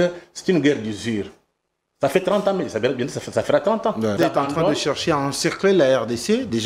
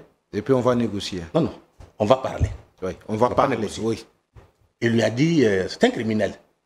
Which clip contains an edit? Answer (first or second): first